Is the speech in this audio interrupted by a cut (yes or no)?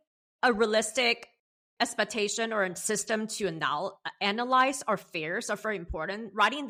no